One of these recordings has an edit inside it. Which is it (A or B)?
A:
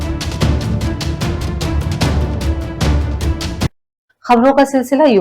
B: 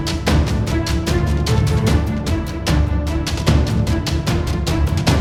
A